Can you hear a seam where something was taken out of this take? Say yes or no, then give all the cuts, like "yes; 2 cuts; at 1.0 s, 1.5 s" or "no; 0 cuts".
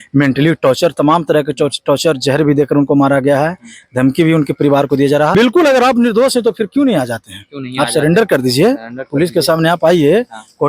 yes; 1 cut; at 5.3 s